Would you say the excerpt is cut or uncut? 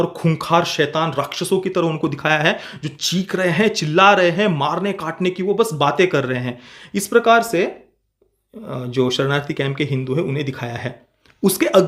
uncut